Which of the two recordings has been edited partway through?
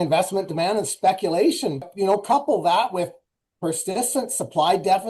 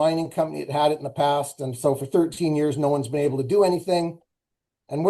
first; 1 cut; at 1.8 s

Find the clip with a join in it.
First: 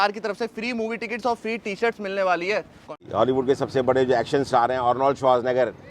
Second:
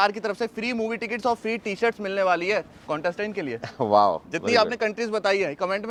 first; 1 cut; at 3.0 s

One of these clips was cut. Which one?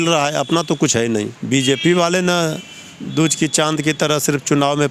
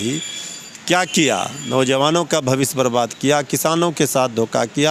first; 1 cut; at 1.4 s

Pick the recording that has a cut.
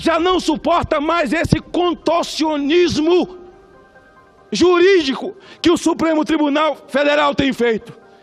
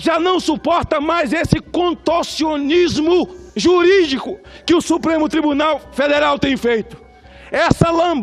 second; 1 cut; at 3.4 s

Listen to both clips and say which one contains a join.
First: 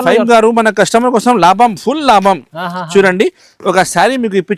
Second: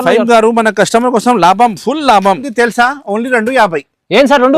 second; 1 cut; at 2.5 s

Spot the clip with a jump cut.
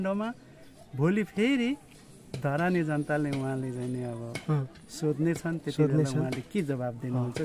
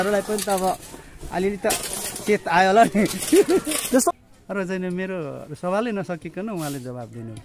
second; 1 cut; at 4.2 s

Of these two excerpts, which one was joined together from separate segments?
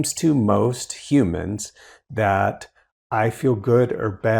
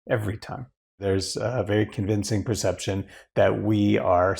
second; 1 cut; at 1.0 s

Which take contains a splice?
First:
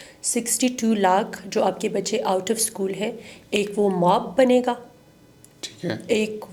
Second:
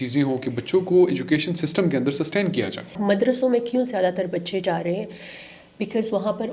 second; 1 cut; at 2.8 s

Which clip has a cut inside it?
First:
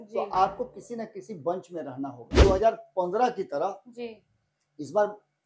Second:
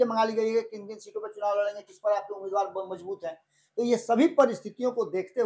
first; 1 cut; at 2.4 s

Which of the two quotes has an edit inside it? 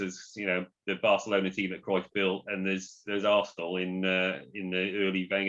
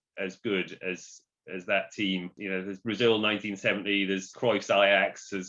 second; 2 cuts; at 2.3 s, 4.3 s

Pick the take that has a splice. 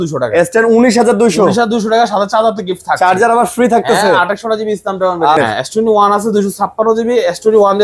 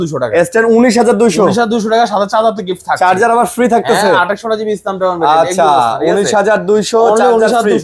first; 1 cut; at 5.4 s

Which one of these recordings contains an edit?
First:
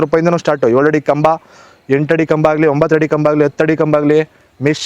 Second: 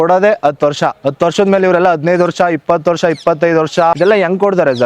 second; 2 cuts; at 1.0 s, 4.0 s

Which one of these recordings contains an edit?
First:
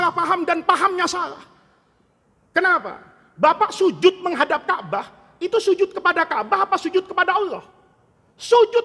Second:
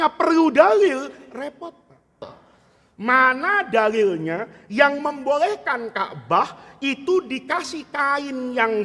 second; 1 cut; at 2.3 s

